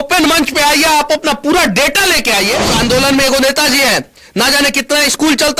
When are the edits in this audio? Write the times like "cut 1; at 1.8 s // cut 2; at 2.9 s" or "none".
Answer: cut 1; at 2.7 s